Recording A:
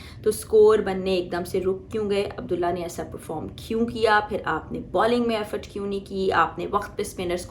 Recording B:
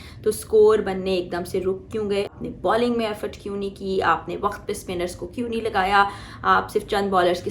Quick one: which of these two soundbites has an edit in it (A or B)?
B